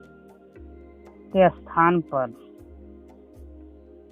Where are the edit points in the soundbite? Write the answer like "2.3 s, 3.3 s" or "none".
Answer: 1.3 s, 2.3 s